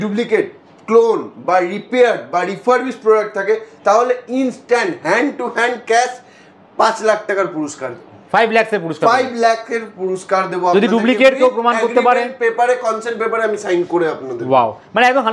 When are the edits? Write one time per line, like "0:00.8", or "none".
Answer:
none